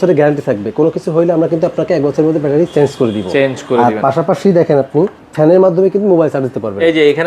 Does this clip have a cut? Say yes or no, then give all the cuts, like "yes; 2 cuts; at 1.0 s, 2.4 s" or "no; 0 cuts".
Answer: yes; 1 cut; at 5.2 s